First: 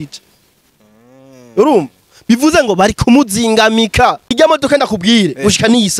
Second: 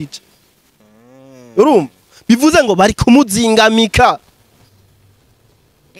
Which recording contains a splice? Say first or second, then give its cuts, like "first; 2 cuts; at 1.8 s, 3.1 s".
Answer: first; 1 cut; at 4.3 s